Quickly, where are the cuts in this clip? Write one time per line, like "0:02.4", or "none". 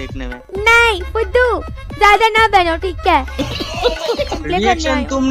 0:04.4

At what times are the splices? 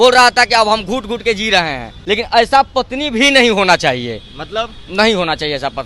0:02.0

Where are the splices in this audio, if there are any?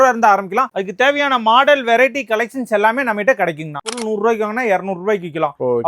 0:03.9

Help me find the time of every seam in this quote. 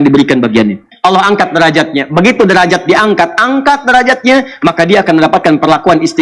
0:00.9

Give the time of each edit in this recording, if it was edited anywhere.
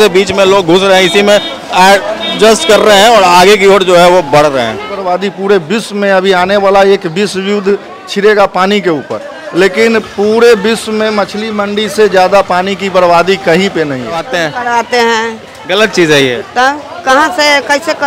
0:04.9
0:14.3

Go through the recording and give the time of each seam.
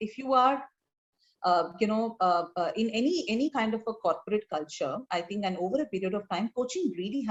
none

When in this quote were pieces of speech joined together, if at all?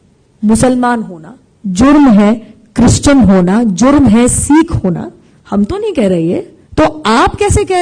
0:06.6

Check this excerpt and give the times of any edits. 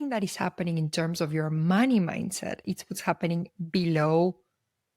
0:02.6

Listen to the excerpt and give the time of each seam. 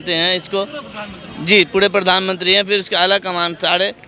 none

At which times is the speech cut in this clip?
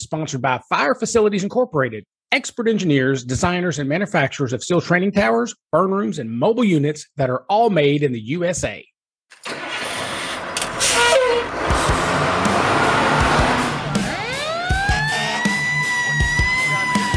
none

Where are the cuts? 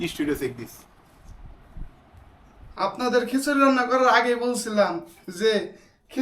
0:02.6

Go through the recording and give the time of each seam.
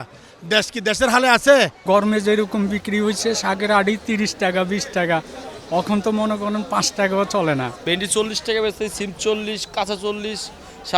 0:01.8
0:07.8

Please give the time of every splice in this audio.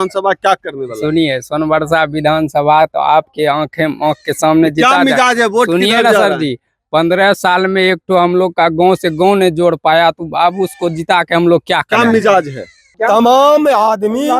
0:12.9

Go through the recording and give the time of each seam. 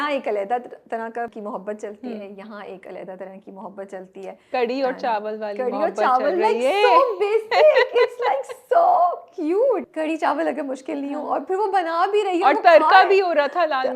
0:01.3
0:09.9

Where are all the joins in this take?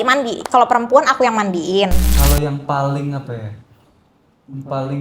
0:02.1

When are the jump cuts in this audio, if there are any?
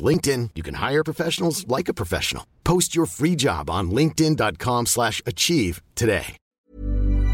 0:06.4

